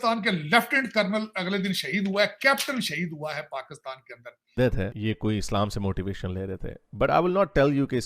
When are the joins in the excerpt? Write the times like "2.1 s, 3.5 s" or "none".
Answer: 4.5 s